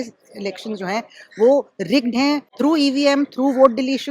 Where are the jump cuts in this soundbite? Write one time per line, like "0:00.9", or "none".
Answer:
0:02.5